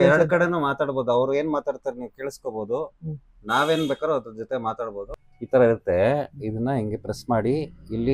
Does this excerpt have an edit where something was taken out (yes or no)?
yes